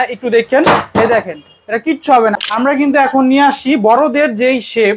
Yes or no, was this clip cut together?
yes